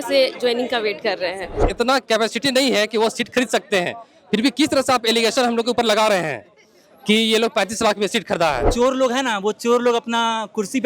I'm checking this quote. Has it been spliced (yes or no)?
yes